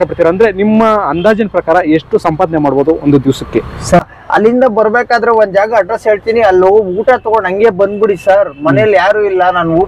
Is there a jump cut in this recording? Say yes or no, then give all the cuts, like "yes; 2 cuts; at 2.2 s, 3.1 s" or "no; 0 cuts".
yes; 1 cut; at 4.0 s